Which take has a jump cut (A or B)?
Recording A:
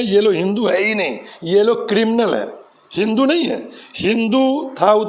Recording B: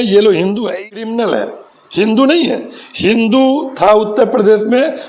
B